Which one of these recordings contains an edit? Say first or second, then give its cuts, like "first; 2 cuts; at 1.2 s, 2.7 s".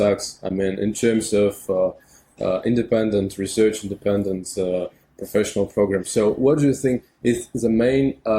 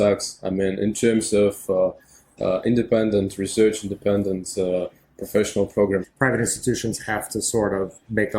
second; 1 cut; at 6.1 s